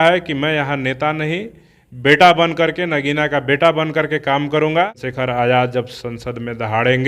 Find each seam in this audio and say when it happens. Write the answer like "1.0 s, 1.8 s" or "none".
5.0 s

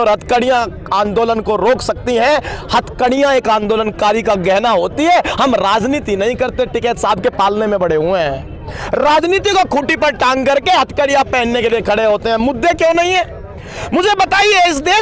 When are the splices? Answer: none

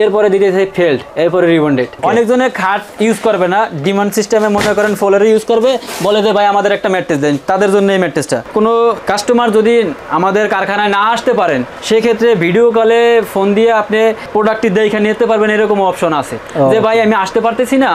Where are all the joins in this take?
2.0 s, 8.4 s

